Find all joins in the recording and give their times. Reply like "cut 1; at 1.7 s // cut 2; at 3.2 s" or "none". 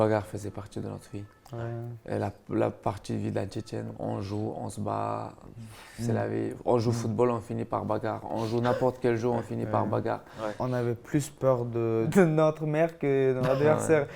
cut 1; at 3.9 s // cut 2; at 10.6 s // cut 3; at 12.1 s

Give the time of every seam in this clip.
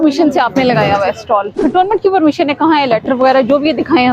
cut 1; at 1.5 s

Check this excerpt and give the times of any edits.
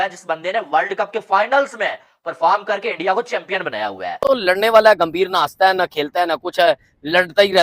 cut 1; at 4.2 s

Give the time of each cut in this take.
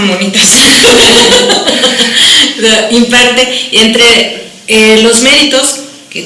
cut 1; at 2.8 s

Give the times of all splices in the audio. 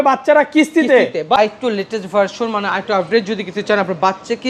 cut 1; at 1.4 s

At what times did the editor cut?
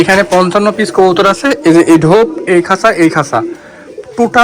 none

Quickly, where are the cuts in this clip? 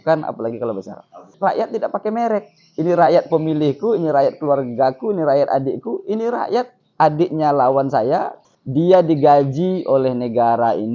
cut 1; at 1.3 s // cut 2; at 8.4 s

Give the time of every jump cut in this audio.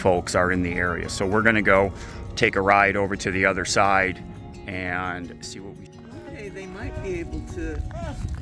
cut 1; at 5.9 s

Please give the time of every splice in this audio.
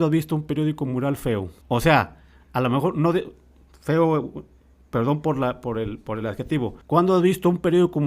cut 1; at 1.5 s // cut 2; at 6.8 s

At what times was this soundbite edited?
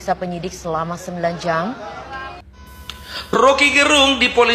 cut 1; at 2.6 s

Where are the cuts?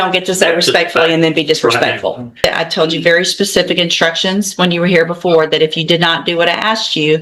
cut 1; at 2.4 s

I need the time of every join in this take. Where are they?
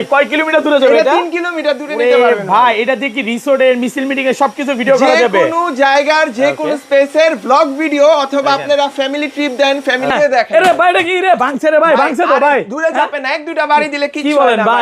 cut 1; at 10.1 s

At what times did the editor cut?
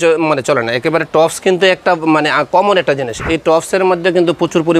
none

